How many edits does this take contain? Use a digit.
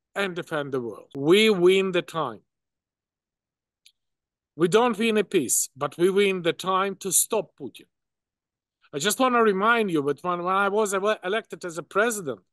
1